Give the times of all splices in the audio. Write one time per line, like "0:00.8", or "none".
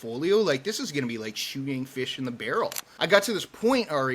0:02.8